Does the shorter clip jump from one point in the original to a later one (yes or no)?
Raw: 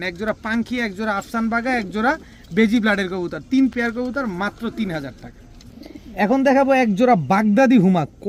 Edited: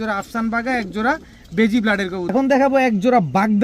yes